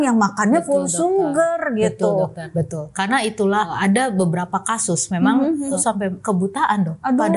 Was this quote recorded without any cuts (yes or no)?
no